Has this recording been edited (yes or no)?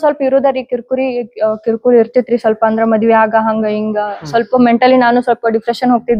no